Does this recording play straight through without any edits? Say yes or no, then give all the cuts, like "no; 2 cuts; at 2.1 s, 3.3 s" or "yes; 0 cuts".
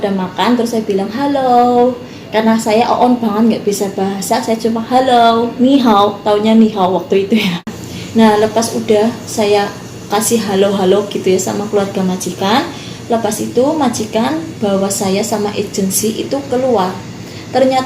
no; 1 cut; at 7.7 s